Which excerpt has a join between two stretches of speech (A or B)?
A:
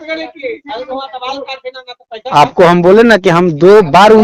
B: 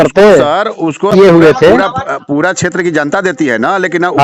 B